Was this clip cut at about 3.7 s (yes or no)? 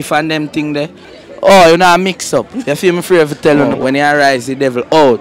yes